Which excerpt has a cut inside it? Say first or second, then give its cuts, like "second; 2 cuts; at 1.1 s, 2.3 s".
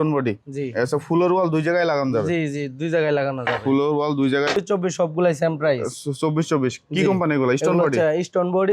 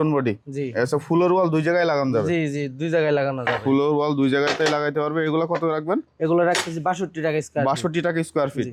first; 1 cut; at 4.5 s